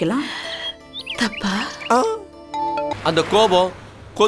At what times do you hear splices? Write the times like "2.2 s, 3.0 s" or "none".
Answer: 2.9 s

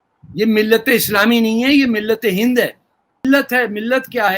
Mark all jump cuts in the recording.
3.2 s

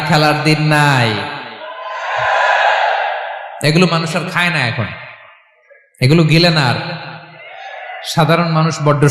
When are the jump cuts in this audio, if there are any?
none

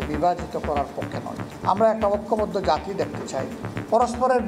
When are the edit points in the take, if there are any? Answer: 1.5 s

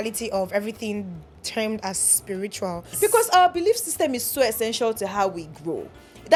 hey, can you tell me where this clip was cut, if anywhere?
none

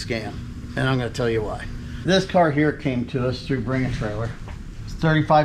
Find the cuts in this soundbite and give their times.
none

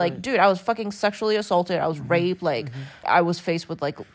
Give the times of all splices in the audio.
3.0 s

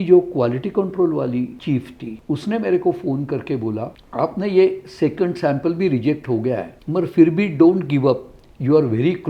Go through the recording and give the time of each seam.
1.8 s, 4.0 s, 6.8 s

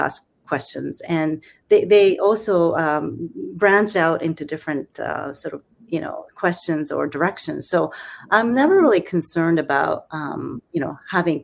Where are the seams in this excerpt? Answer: none

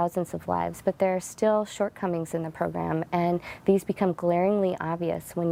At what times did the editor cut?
none

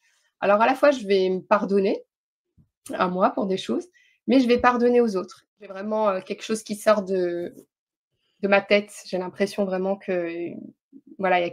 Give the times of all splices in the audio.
5.5 s

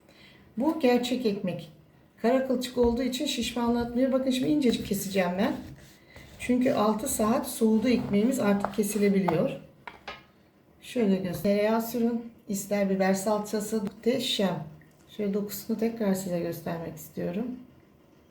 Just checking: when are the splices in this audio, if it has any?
11.4 s, 13.8 s

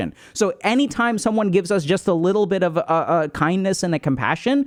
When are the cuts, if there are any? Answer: none

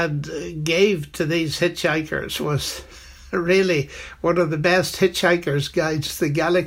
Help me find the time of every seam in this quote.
none

